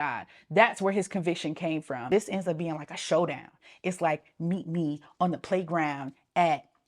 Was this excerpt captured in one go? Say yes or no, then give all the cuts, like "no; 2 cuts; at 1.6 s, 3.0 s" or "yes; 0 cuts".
no; 1 cut; at 2.1 s